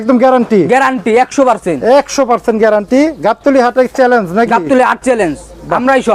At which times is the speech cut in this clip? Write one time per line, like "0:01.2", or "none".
none